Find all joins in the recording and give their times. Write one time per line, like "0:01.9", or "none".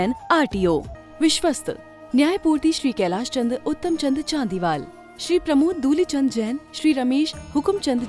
0:01.0